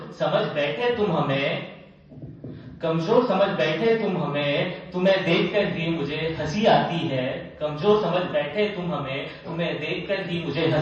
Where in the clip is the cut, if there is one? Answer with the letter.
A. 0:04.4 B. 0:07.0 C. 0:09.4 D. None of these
D